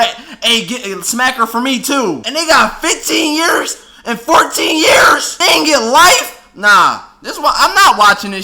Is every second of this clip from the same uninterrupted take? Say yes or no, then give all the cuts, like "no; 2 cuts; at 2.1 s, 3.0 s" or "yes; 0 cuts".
no; 2 cuts; at 2.2 s, 5.3 s